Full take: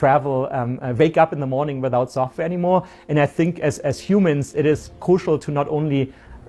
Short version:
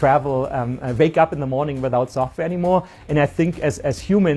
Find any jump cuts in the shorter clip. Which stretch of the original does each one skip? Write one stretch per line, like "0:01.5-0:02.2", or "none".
none